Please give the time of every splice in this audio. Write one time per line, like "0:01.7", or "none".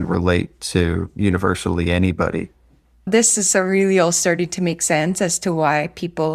0:03.0